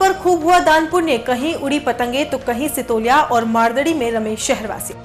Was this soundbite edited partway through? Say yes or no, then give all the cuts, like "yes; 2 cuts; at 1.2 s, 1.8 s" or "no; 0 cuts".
no; 0 cuts